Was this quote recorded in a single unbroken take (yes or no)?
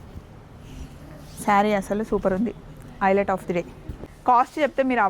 no